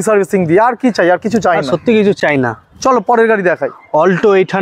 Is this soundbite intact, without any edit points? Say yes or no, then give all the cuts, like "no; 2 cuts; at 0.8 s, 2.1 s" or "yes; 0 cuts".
yes; 0 cuts